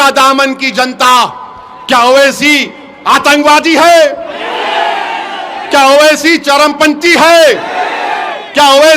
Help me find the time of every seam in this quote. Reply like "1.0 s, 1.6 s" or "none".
none